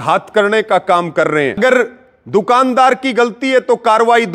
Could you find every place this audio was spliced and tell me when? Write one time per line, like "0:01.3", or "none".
0:01.6